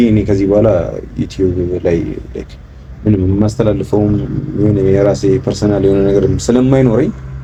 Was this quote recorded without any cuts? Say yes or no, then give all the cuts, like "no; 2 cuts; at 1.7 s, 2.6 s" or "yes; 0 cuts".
yes; 0 cuts